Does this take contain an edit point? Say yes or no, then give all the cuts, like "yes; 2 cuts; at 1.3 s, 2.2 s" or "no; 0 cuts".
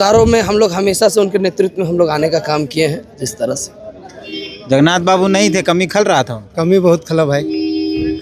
no; 0 cuts